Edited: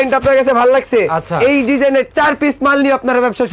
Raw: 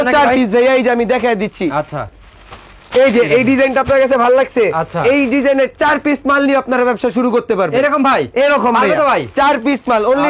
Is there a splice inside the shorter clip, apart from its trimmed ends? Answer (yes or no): no